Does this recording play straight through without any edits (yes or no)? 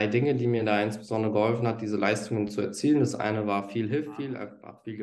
yes